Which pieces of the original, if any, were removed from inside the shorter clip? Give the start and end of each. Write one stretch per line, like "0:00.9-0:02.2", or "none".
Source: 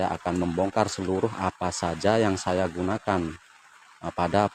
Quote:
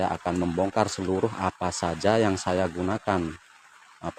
none